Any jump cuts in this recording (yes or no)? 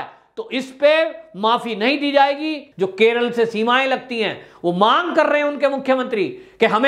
yes